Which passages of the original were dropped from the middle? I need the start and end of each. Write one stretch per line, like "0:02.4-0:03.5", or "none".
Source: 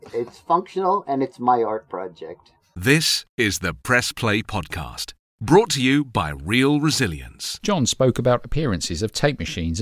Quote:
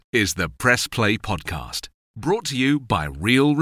none